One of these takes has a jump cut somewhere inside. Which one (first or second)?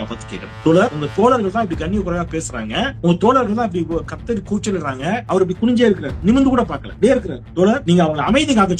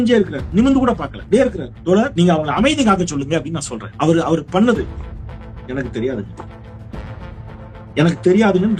first